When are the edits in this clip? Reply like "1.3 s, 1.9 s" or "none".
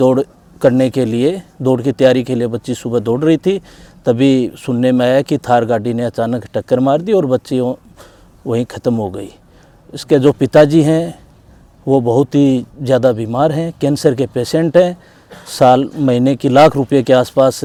none